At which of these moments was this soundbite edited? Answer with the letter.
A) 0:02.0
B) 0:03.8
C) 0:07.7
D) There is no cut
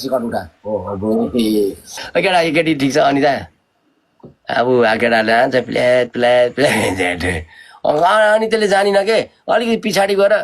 A